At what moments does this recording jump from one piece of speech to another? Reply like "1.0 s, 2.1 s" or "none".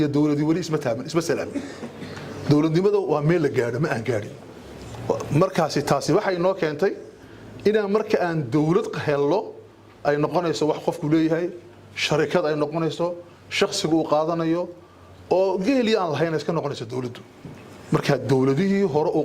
none

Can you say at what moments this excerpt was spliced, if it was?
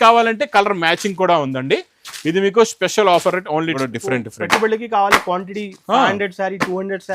3.7 s

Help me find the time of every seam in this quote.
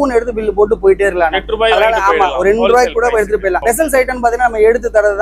none

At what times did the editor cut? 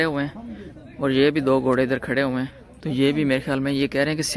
none

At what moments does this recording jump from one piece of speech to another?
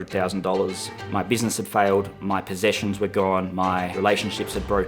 0.9 s, 2.2 s, 3.6 s

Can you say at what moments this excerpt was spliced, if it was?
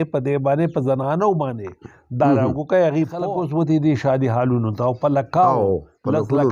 3.2 s

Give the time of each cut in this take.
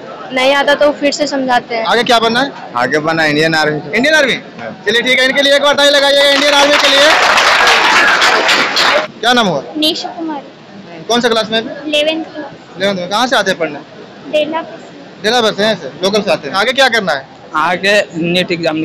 1.8 s, 9.0 s, 16.5 s

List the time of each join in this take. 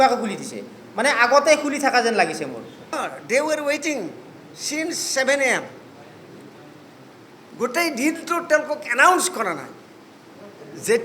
3.0 s

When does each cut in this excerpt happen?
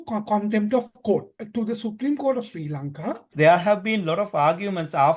1.4 s, 3.3 s

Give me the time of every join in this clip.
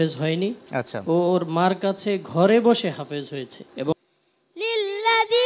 3.9 s

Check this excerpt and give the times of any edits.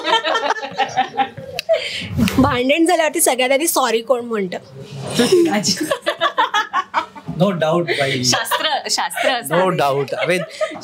2.3 s

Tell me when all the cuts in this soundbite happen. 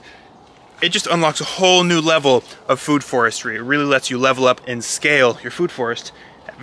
4.8 s

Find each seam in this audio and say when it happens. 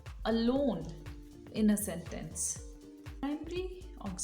3.2 s

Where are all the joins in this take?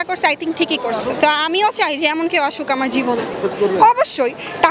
none

